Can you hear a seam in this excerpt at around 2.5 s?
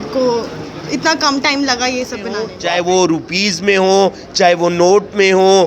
yes; 1 cut; at 2.5 s

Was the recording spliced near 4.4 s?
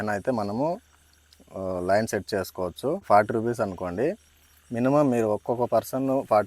no; 1 cut; at 3.0 s

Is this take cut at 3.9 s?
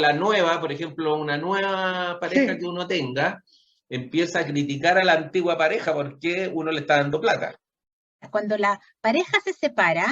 no; 1 cut; at 8.3 s

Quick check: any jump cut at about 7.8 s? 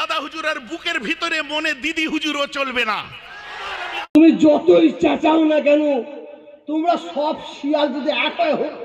no; 1 cut; at 4.1 s

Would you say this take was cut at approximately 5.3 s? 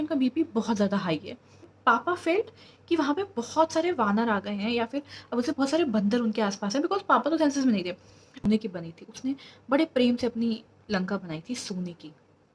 no; 2 cuts; at 1.5 s, 8.3 s

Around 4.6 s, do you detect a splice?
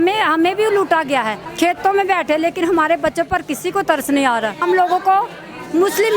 yes; 2 cuts; at 1.4 s, 4.6 s

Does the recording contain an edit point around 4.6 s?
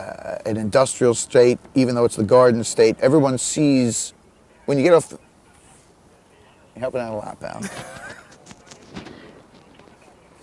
no; 1 cut; at 3.4 s

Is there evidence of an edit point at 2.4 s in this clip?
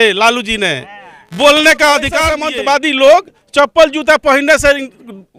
yes; 1 cut; at 2.4 s

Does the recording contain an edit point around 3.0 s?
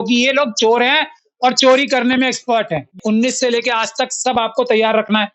yes; 1 cut; at 3.0 s

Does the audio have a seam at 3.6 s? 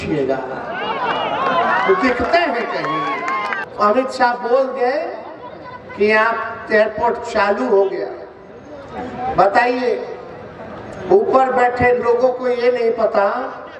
yes; 1 cut; at 3.6 s

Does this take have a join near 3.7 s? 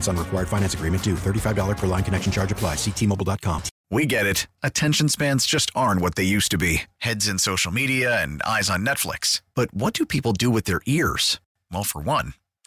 yes; 1 cut; at 3.7 s

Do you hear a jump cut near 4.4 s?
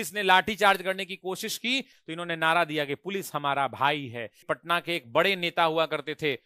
yes; 2 cuts; at 2.0 s, 4.4 s

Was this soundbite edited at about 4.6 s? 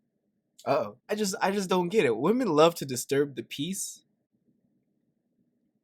no; 1 cut; at 1.0 s

